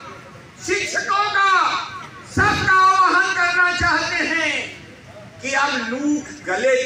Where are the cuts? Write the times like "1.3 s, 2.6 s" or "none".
none